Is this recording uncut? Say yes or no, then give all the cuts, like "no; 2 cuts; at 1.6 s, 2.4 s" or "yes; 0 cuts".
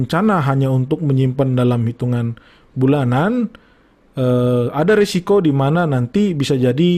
yes; 0 cuts